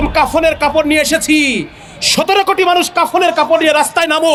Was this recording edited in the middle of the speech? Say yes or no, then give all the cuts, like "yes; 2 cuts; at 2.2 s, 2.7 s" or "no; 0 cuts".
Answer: no; 0 cuts